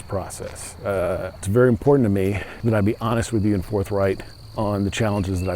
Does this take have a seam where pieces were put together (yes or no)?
yes